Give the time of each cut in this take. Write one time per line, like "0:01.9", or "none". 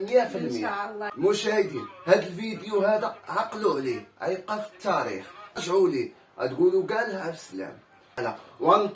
0:01.0
0:05.6
0:08.2